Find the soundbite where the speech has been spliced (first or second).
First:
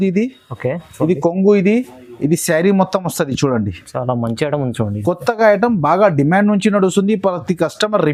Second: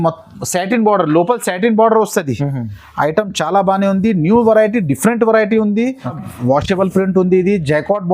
second